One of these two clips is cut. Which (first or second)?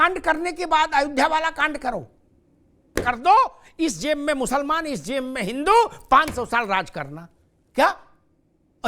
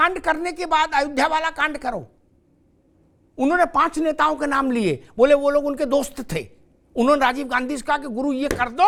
first